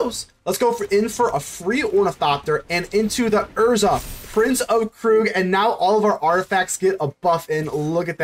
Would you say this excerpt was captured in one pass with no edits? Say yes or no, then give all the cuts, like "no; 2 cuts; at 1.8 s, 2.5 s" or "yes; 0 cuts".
yes; 0 cuts